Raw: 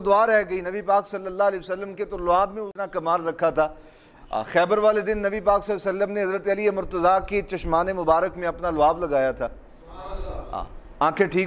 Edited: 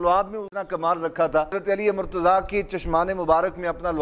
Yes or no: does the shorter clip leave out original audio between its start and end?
yes